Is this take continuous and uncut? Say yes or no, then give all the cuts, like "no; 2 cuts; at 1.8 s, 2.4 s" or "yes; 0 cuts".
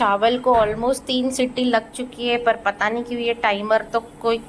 yes; 0 cuts